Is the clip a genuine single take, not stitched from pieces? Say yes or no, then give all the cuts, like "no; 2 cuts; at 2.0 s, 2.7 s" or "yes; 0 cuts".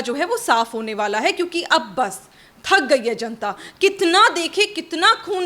yes; 0 cuts